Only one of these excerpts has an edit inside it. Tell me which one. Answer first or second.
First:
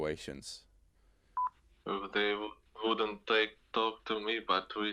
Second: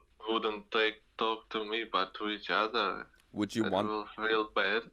first